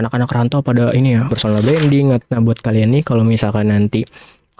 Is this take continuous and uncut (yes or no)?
no